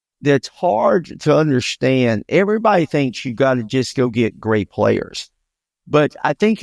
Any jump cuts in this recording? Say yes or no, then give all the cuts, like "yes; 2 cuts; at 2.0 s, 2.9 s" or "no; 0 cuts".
no; 0 cuts